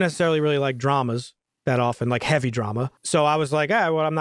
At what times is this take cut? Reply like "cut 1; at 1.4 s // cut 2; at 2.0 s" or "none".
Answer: cut 1; at 3.0 s